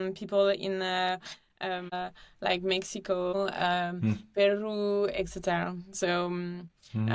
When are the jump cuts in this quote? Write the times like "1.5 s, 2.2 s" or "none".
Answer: 1.9 s, 3.3 s